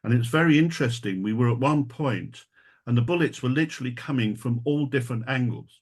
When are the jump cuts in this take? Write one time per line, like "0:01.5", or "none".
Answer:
0:03.0